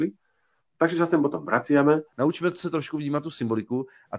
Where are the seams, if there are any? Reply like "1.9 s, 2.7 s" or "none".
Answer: 2.1 s